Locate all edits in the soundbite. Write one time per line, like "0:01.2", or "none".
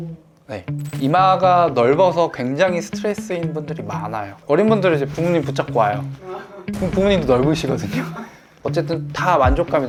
none

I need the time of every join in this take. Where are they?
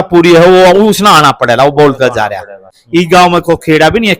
0:02.7

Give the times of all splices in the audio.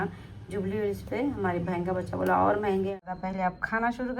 0:03.1

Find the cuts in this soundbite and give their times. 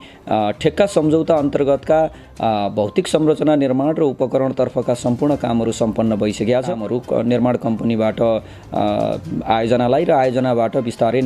0:06.8

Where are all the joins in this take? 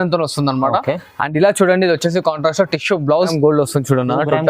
0:03.3

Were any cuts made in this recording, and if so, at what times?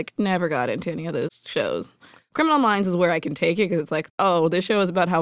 0:01.4
0:02.2
0:04.1

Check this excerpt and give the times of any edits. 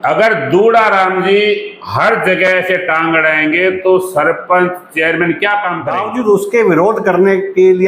0:05.8

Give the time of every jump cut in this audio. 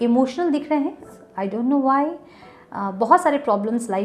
0:01.1

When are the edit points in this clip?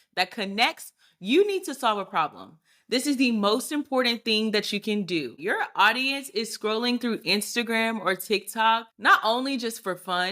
0:05.3
0:08.9

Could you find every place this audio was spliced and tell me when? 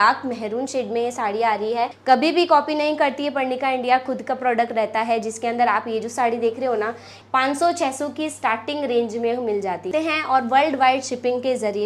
0:02.0
0:07.1
0:09.9

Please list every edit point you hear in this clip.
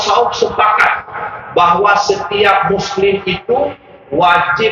none

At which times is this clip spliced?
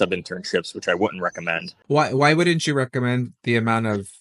0:01.7

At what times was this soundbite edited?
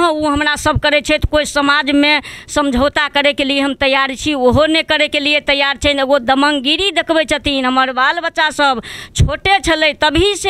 none

